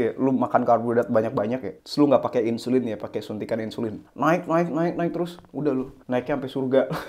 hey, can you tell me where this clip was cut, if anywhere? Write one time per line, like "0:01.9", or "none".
0:06.0